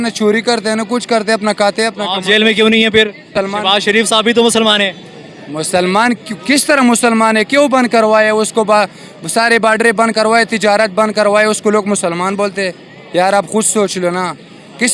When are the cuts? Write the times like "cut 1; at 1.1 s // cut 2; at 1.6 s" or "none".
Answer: cut 1; at 3.3 s

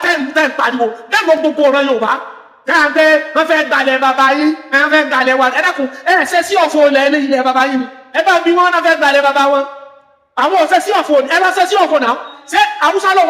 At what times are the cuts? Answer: cut 1; at 12.4 s

